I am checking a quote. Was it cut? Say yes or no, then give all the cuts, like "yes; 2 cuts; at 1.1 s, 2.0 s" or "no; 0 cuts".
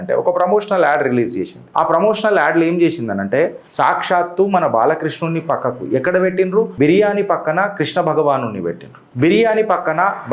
yes; 2 cuts; at 3.6 s, 6.7 s